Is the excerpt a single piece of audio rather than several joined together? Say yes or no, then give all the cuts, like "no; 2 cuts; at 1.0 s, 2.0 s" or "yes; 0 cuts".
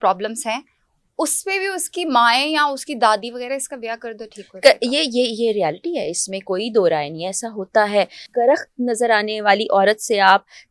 no; 1 cut; at 8.2 s